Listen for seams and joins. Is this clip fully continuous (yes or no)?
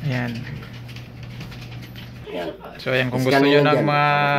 no